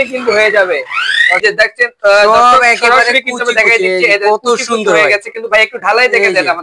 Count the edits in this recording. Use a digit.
1